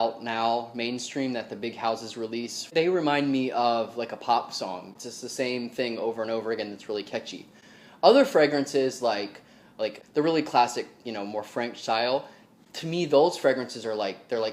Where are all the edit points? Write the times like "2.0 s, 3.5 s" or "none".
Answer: 2.7 s, 4.9 s, 10.0 s